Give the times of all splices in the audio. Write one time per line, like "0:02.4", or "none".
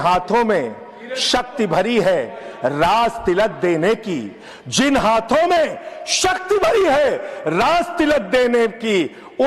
none